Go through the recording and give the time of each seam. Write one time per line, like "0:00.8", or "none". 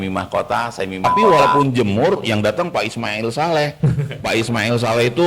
0:01.1